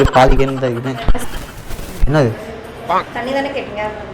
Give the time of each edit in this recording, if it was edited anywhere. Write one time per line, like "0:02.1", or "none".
0:01.3